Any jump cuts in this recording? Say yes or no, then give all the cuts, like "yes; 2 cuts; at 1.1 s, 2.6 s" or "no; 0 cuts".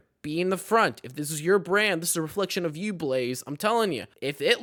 no; 0 cuts